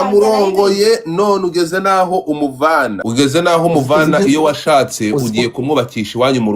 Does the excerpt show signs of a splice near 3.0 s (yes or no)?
yes